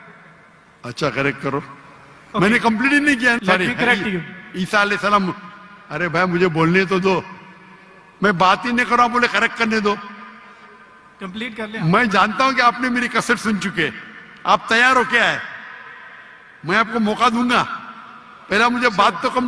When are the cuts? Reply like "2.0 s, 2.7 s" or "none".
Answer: 3.4 s